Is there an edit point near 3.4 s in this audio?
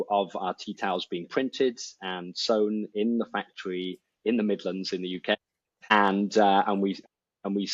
no; 0 cuts

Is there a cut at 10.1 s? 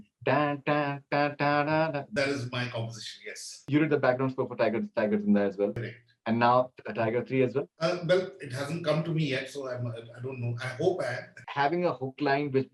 no; 3 cuts; at 2.0 s, 3.5 s, 11.4 s

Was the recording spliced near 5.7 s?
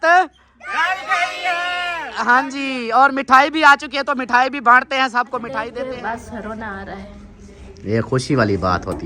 yes; 1 cut; at 5.7 s

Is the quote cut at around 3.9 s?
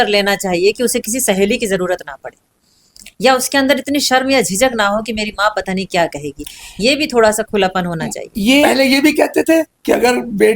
no; 1 cut; at 8.6 s

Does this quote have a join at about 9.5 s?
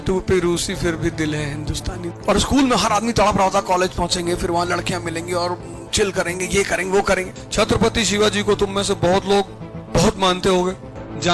no; 2 cuts; at 2.1 s, 7.4 s

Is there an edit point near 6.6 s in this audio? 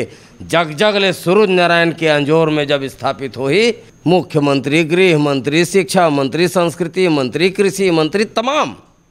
no; 1 cut; at 3.9 s

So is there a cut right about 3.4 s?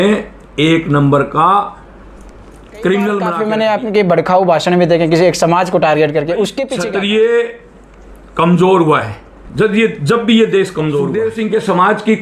yes; 3 cuts; at 3.4 s, 6.7 s, 11.3 s

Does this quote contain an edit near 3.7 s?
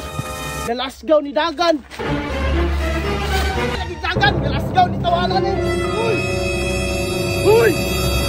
yes; 1 cut; at 3.7 s

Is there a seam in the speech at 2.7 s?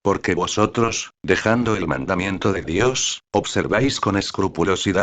no; 1 cut; at 1.1 s

